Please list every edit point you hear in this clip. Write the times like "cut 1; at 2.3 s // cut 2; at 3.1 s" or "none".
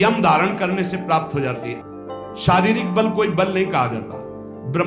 cut 1; at 1.8 s